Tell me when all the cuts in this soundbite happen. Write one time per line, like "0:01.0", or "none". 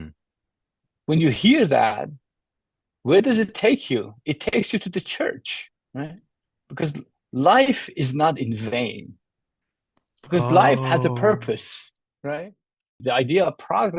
0:13.0